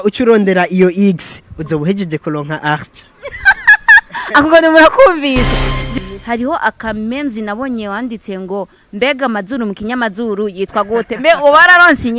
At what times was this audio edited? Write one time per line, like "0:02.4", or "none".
0:05.8